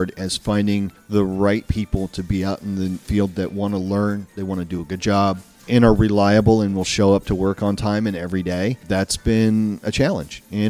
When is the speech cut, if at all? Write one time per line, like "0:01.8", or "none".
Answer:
0:01.0
0:03.0
0:05.6
0:08.8